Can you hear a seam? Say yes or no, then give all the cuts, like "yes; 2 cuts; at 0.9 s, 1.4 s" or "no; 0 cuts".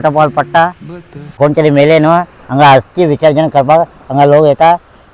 yes; 1 cut; at 1.4 s